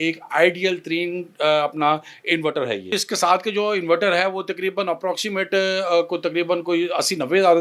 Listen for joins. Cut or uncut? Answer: cut